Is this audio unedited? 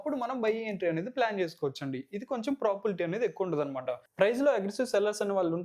no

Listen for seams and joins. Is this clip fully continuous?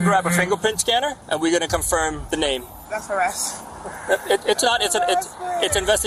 no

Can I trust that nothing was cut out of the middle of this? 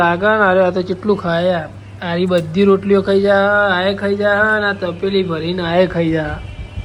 yes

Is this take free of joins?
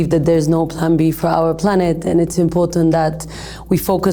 yes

